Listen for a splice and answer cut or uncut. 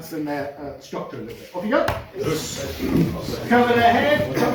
uncut